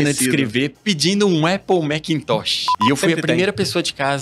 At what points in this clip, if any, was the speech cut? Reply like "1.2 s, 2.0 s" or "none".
2.7 s